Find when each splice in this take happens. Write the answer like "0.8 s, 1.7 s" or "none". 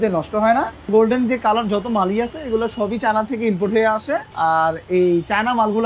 0.9 s, 4.3 s

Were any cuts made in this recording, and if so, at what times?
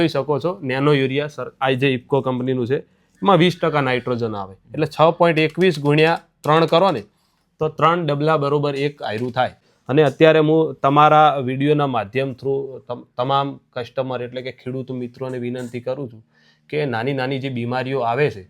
9.7 s

